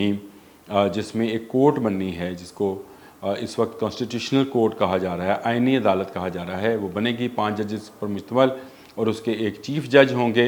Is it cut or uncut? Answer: uncut